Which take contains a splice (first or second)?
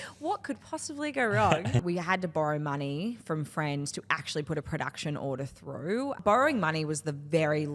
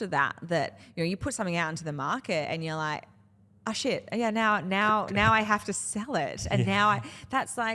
first